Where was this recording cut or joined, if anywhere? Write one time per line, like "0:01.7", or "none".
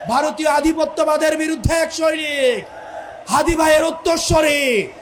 none

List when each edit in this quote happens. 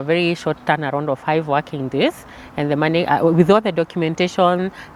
none

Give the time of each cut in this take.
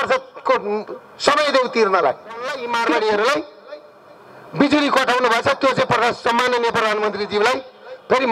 0:02.5

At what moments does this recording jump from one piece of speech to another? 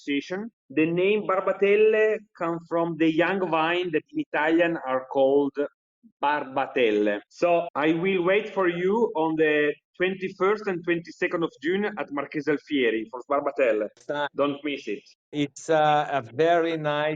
0:04.1
0:15.3

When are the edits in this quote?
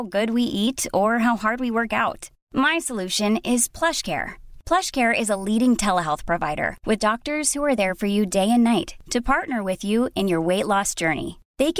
none

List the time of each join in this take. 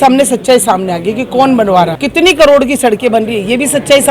0:02.0

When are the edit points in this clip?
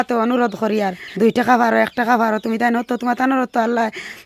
0:01.0

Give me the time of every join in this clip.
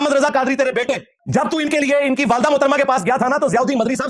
0:01.1

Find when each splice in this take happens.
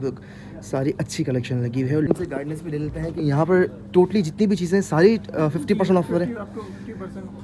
0:02.1

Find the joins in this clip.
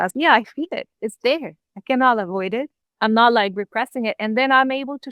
0:02.8

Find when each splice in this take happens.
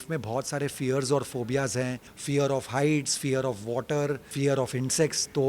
0:02.1
0:04.3

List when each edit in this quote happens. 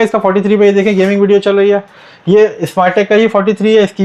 none

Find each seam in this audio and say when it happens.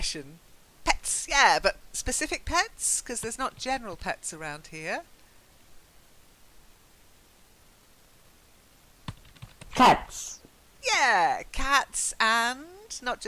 0:08.5

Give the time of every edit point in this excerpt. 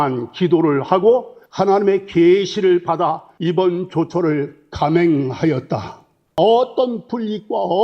0:06.4

